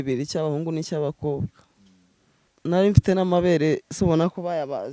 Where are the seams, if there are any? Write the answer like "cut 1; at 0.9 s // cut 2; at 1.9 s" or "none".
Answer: cut 1; at 2.5 s